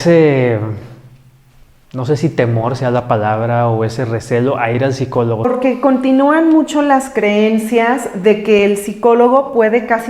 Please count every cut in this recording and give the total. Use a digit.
1